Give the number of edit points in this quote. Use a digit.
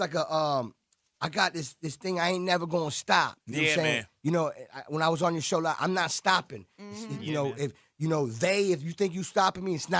1